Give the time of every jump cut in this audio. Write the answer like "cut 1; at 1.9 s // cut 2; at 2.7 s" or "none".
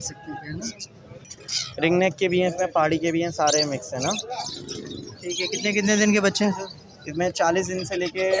cut 1; at 1.3 s